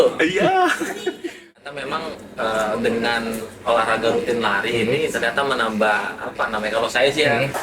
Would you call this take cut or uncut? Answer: cut